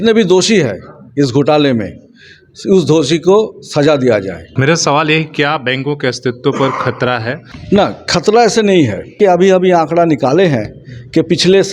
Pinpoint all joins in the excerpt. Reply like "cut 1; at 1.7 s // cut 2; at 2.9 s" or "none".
cut 1; at 4.4 s // cut 2; at 7.5 s // cut 3; at 9.1 s